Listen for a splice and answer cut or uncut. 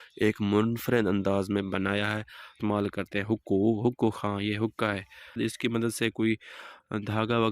cut